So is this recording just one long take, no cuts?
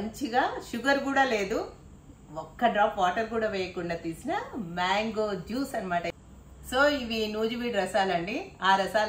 no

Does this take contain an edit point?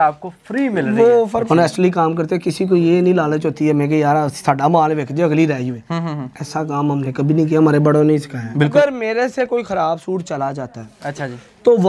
yes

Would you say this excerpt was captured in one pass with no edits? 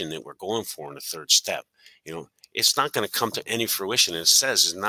yes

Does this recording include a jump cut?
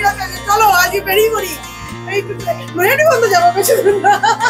no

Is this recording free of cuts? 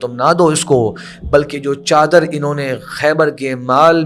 yes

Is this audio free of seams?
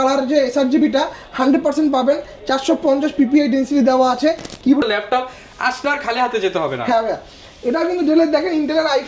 no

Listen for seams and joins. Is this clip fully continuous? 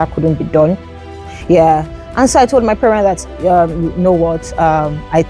no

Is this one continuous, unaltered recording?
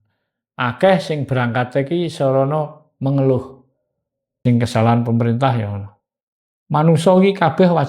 no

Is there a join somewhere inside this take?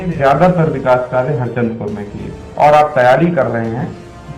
no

